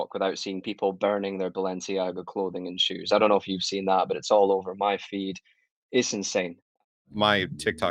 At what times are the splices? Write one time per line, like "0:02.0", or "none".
0:06.8